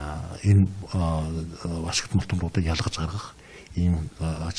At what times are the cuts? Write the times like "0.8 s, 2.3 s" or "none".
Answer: 1.2 s